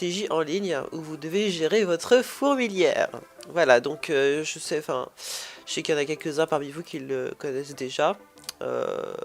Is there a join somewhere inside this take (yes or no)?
no